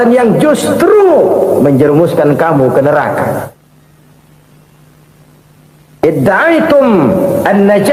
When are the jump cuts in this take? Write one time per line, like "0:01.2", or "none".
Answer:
none